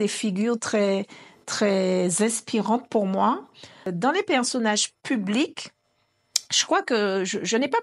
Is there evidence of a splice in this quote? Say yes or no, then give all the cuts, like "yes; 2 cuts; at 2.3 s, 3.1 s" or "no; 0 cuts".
no; 0 cuts